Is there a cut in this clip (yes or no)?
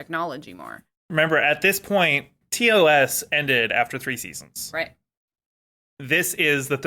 yes